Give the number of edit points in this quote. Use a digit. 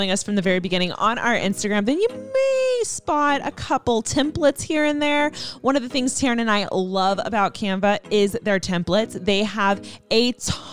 0